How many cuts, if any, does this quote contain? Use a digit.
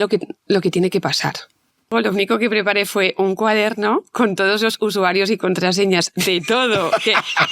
1